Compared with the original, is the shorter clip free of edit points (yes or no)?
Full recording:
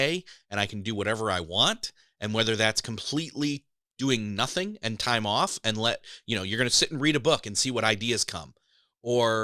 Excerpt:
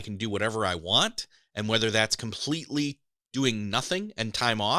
yes